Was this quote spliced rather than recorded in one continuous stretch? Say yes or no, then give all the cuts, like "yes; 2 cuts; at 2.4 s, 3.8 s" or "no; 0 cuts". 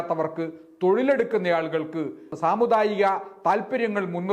yes; 1 cut; at 2.3 s